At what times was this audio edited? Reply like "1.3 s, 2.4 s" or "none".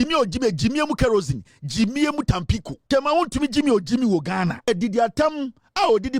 2.7 s, 4.7 s